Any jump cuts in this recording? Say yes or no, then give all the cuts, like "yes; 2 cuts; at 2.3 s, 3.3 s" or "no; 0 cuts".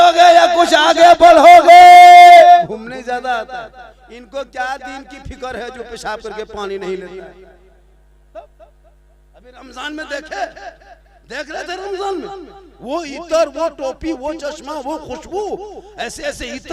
yes; 1 cut; at 2.6 s